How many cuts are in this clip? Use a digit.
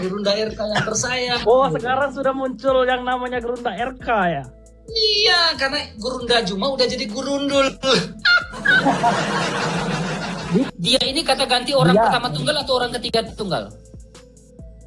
1